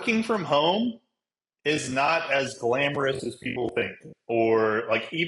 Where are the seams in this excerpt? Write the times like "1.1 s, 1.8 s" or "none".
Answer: none